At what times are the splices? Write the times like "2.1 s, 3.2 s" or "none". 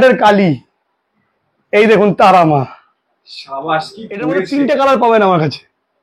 4.4 s